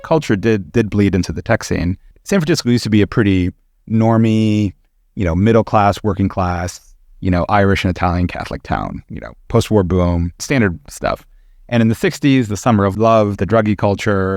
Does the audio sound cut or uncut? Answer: cut